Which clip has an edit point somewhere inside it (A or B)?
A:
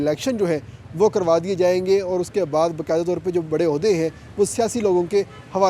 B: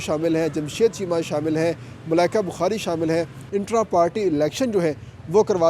B